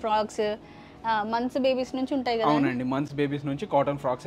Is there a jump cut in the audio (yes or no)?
no